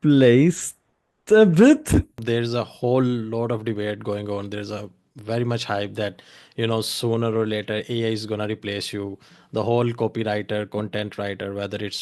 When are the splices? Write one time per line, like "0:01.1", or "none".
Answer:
0:02.2

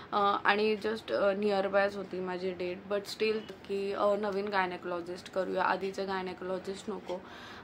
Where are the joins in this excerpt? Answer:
0:03.5

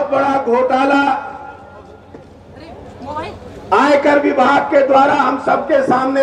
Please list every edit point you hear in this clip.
none

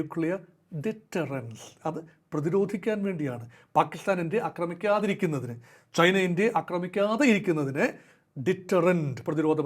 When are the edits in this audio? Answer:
none

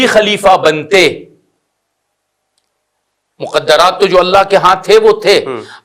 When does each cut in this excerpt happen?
none

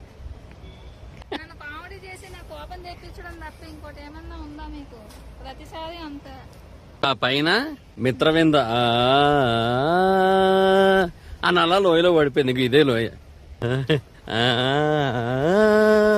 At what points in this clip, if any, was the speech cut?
0:01.1
0:06.9
0:07.8
0:13.6

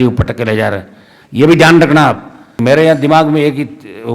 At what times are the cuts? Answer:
0:02.6

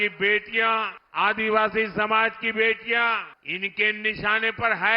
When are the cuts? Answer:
0:01.0
0:03.4

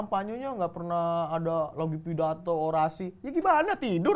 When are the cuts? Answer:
none

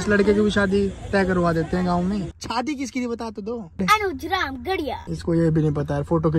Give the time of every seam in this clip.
0:02.3
0:03.8
0:05.1

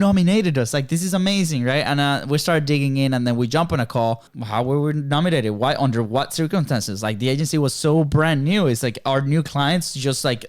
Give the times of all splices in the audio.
0:04.4

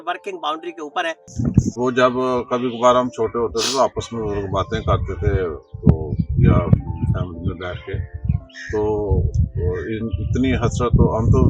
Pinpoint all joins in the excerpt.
0:01.4

